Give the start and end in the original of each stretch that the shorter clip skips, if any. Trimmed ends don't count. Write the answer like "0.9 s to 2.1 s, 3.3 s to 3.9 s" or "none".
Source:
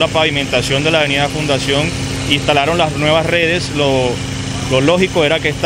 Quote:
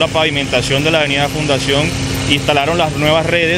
none